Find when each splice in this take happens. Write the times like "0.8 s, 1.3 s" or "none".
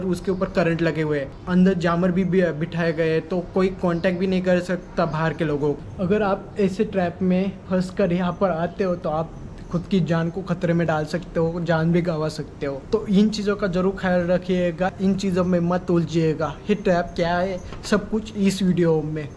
1.3 s, 5.9 s, 12.8 s, 14.9 s